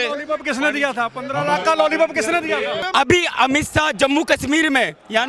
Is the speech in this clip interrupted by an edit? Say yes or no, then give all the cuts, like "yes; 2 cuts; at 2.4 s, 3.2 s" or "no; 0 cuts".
yes; 1 cut; at 2.8 s